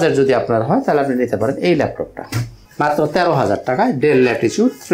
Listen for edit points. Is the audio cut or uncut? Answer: uncut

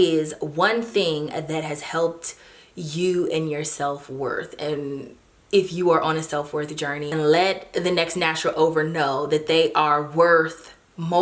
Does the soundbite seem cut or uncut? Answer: cut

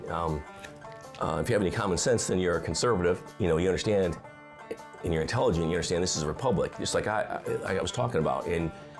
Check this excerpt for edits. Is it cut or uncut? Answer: cut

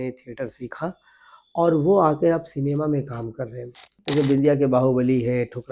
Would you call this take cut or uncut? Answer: cut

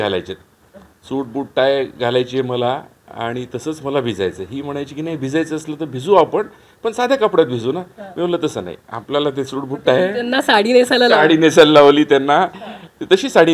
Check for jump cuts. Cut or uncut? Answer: uncut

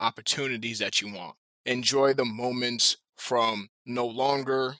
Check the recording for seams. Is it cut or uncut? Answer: cut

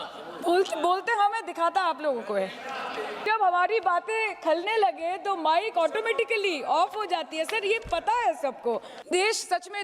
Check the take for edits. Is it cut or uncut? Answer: cut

